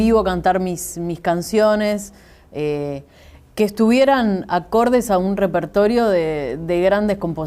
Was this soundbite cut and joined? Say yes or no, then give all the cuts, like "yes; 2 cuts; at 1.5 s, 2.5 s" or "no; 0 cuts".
yes; 1 cut; at 5.5 s